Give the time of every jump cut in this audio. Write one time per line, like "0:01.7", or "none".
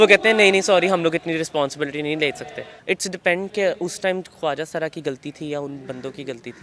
0:02.6